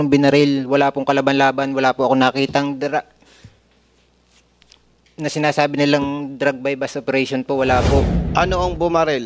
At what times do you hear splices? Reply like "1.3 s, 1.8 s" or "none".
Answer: 8.2 s